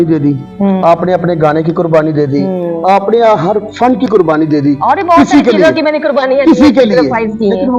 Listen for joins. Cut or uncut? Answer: uncut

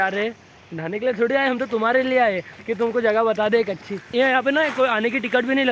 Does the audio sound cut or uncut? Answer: cut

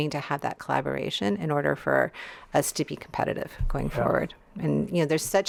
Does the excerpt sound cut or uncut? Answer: uncut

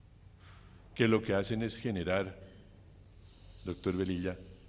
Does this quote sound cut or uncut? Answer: uncut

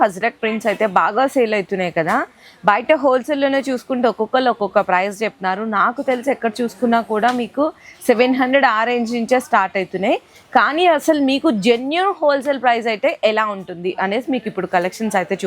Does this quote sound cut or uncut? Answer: uncut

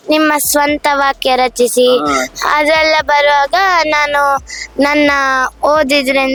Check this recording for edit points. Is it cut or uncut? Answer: uncut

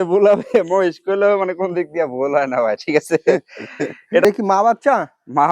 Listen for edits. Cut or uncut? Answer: cut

